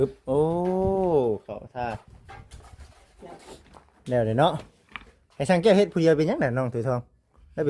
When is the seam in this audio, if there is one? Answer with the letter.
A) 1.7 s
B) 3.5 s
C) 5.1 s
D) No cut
B